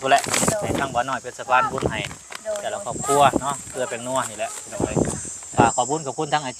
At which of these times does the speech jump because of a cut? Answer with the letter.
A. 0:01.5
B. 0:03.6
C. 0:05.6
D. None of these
C